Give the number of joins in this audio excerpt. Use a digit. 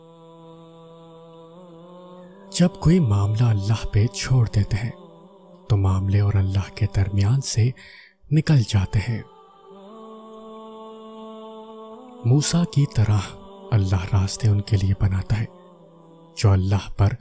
2